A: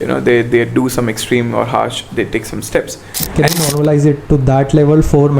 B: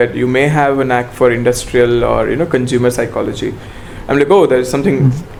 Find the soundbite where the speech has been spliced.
A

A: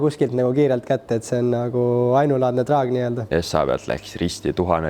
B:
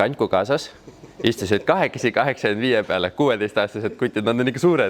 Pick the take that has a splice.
A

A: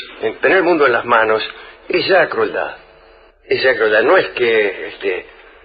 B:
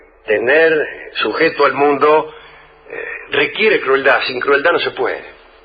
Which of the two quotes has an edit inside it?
B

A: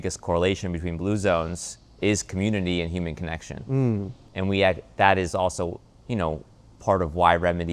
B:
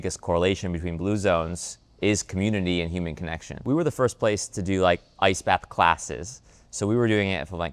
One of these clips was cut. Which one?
B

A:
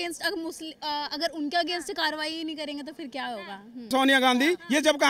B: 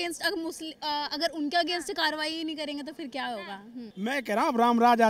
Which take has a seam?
A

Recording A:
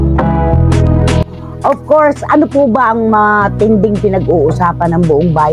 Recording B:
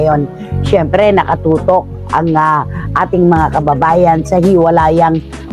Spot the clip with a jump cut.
A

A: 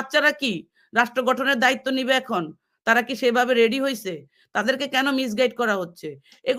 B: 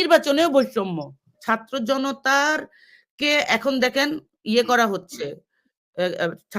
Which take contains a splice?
B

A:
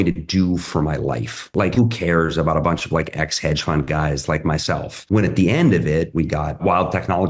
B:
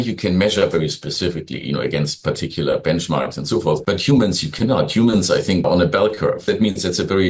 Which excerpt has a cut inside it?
A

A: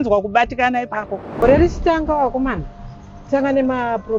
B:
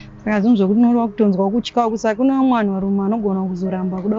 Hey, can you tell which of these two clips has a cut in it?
A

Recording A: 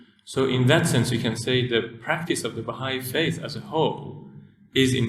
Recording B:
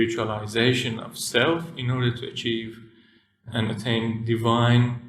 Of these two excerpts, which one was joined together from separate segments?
B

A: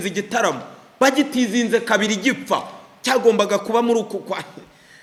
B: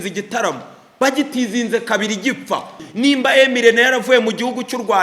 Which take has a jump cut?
B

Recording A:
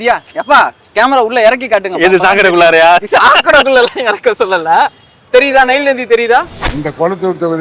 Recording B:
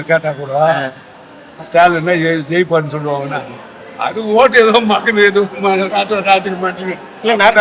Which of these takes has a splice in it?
A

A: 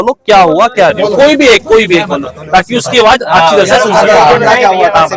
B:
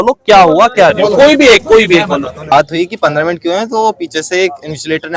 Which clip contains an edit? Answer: B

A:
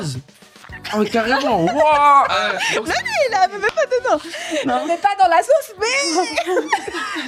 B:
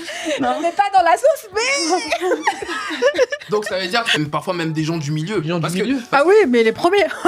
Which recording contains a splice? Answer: B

